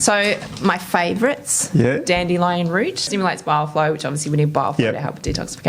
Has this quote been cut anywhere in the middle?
yes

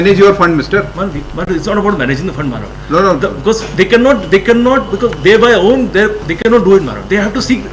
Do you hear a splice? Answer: no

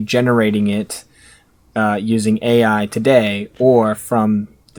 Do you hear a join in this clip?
no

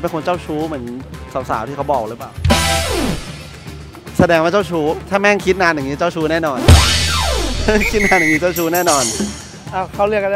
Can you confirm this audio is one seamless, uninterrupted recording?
yes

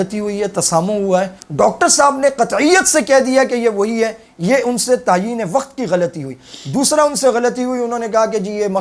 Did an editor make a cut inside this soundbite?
yes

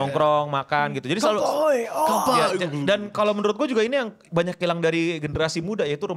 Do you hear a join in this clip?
no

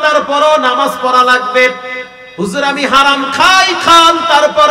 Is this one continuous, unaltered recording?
yes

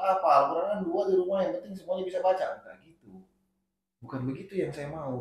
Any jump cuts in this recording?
no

